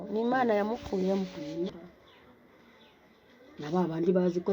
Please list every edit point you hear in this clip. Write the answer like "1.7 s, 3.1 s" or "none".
1.8 s